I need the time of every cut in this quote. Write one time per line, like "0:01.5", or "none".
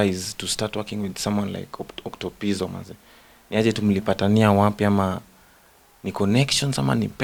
none